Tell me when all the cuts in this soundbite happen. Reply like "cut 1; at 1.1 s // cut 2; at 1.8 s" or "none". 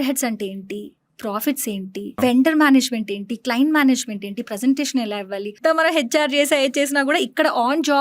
cut 1; at 2.1 s // cut 2; at 5.6 s